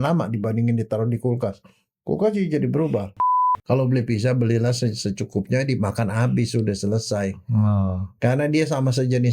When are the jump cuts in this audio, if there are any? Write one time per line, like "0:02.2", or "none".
0:03.1